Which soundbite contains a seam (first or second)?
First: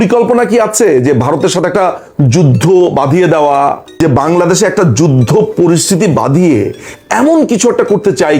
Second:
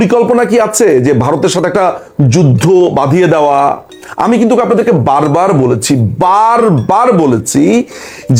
first